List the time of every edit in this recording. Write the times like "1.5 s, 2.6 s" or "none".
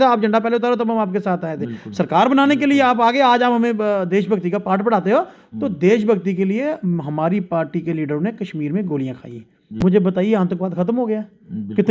9.8 s